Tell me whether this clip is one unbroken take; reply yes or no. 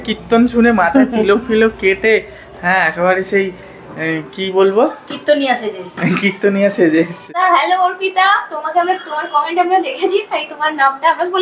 no